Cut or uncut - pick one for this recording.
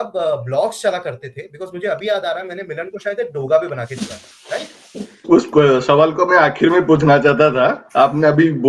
cut